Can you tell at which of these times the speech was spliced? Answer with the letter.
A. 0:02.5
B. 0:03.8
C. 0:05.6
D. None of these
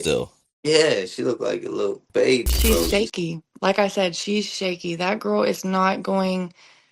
A